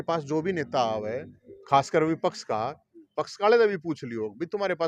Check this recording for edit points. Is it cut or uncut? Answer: uncut